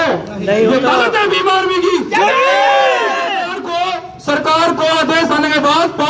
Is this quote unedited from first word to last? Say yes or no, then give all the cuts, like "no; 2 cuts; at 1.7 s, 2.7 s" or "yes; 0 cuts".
yes; 0 cuts